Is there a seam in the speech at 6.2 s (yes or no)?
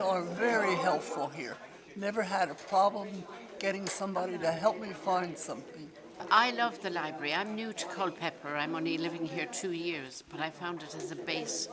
yes